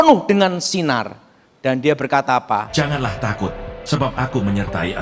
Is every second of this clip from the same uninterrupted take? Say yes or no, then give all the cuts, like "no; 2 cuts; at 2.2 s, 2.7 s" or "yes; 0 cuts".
no; 1 cut; at 2.7 s